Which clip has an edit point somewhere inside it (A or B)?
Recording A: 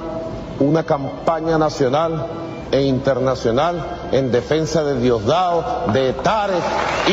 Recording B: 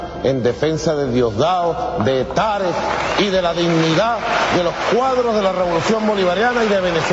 B